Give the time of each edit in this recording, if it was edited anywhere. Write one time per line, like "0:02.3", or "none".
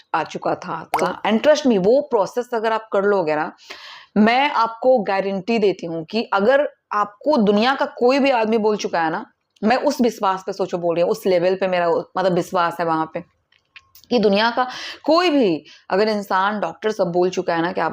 0:01.0